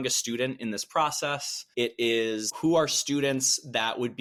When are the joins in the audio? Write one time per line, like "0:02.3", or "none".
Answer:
none